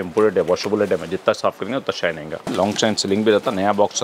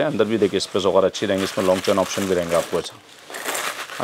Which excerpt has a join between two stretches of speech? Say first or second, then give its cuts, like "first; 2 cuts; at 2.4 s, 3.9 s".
first; 1 cut; at 2.5 s